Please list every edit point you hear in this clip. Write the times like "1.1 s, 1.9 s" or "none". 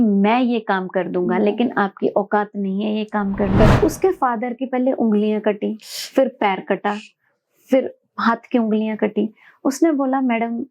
3.7 s